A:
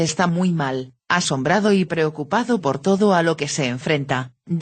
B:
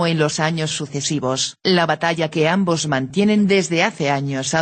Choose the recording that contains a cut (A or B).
B